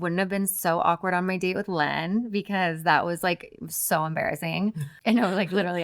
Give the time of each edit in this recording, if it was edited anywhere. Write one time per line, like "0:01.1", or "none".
0:04.9